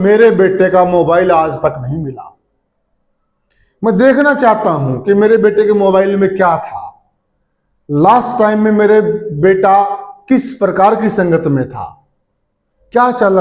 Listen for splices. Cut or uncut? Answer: uncut